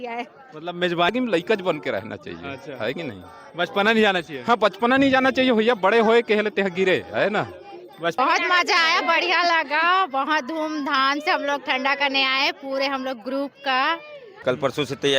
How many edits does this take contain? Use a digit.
3